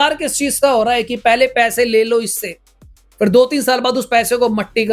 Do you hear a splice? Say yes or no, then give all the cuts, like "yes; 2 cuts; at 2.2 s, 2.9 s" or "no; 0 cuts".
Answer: no; 0 cuts